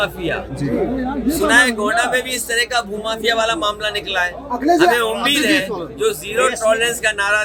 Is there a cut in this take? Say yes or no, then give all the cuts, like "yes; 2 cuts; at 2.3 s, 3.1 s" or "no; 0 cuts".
no; 0 cuts